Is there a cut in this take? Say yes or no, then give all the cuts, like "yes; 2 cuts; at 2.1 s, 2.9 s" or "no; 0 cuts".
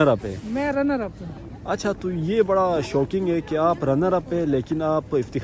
no; 0 cuts